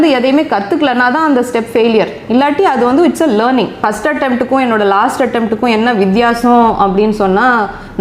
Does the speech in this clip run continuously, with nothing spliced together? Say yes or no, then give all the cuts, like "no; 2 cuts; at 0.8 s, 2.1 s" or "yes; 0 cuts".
no; 1 cut; at 3.8 s